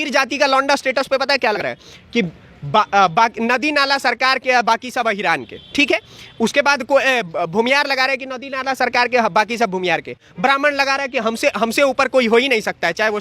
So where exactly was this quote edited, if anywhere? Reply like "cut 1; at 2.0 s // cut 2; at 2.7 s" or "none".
cut 1; at 1.6 s